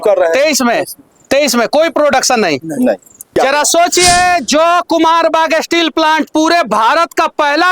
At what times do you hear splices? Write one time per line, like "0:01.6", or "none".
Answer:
0:03.3